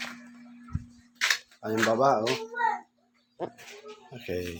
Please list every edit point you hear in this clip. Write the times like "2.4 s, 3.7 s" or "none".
none